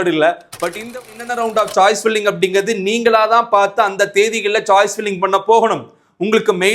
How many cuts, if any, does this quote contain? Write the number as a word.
one